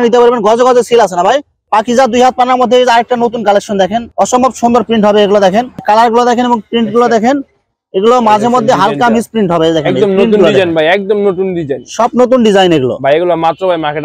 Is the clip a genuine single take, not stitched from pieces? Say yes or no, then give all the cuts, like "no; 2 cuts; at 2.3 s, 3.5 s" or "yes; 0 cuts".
no; 2 cuts; at 1.6 s, 5.8 s